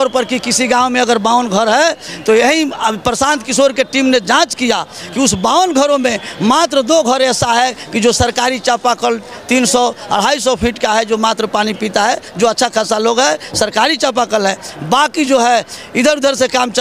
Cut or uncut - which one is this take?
uncut